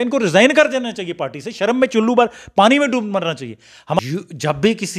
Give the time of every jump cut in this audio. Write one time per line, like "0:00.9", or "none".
0:04.0